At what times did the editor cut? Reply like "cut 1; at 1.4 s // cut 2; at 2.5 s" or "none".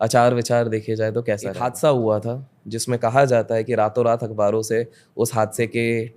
cut 1; at 1.2 s

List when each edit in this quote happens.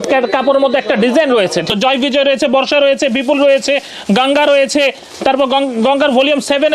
cut 1; at 1.7 s

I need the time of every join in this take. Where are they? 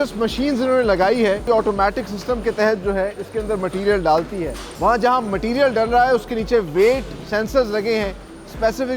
cut 1; at 1.4 s // cut 2; at 4.6 s

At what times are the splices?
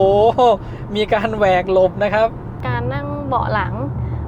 cut 1; at 2.6 s

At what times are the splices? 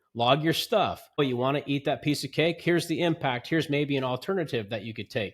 cut 1; at 1.2 s

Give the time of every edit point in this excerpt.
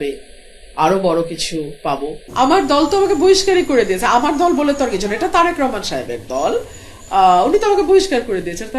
cut 1; at 2.2 s

